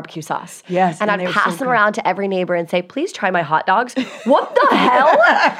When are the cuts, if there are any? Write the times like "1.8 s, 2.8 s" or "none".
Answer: none